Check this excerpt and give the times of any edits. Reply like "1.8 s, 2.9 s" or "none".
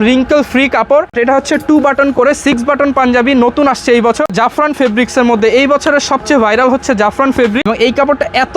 1.1 s, 4.3 s, 7.6 s

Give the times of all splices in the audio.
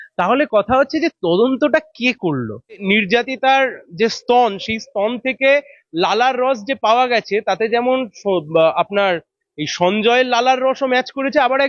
2.8 s

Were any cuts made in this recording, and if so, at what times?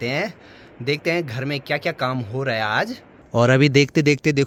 none

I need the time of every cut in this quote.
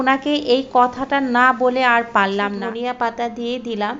2.6 s

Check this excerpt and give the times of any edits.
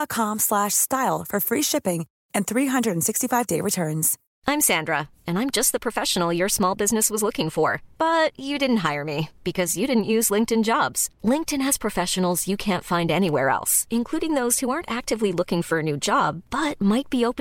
4.2 s

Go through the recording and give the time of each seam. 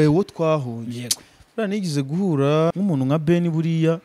2.7 s

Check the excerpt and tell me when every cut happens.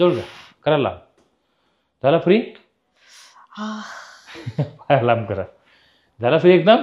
none

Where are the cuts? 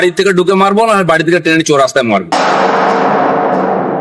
2.3 s

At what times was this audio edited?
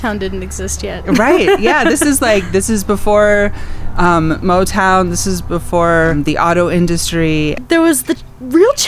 6.1 s, 7.6 s

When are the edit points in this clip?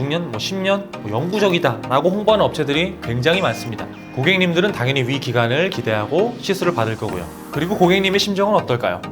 7.4 s

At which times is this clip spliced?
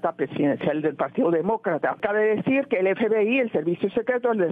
2.0 s

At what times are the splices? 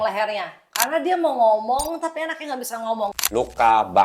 3.1 s

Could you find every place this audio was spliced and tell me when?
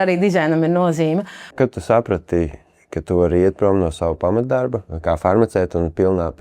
1.5 s, 4.9 s

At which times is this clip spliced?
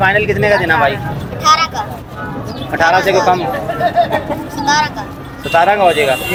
none

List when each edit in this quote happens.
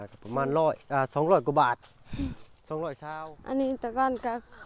3.1 s

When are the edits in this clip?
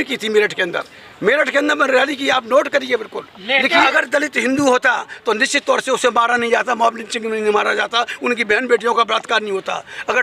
3.8 s

